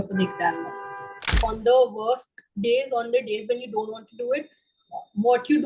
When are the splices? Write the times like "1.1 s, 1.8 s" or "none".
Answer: 1.2 s